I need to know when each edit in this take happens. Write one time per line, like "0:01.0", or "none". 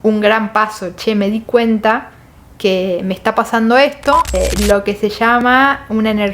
0:04.3